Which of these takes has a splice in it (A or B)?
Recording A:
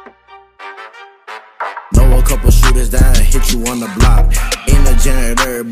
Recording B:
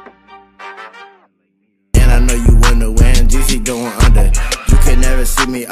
A